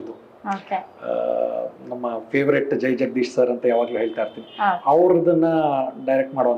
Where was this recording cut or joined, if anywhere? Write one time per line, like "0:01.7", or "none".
none